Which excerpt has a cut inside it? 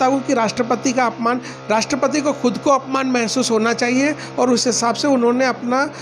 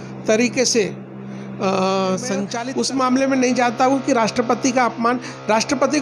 second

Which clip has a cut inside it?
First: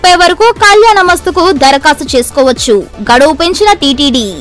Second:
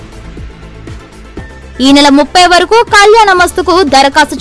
second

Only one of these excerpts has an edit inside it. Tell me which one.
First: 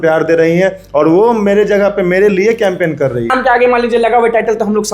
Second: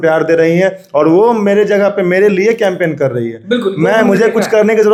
first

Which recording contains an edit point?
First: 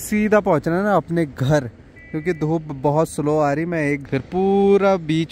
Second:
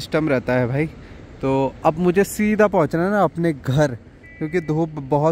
first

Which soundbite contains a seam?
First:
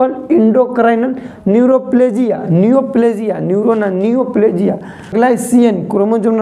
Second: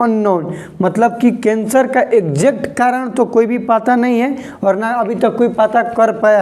first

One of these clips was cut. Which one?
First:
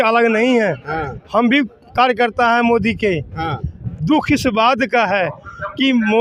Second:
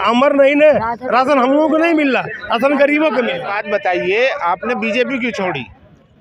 second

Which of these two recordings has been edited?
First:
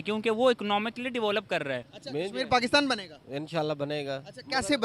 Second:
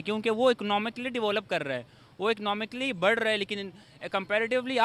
first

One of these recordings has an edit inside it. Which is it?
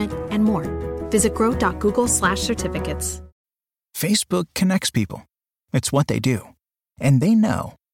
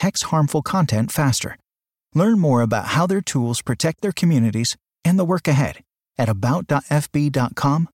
first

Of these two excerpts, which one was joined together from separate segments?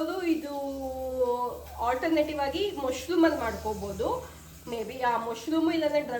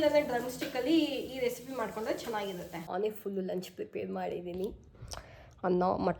second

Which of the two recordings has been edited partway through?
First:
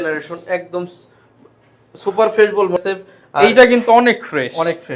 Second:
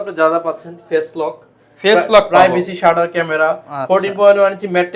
first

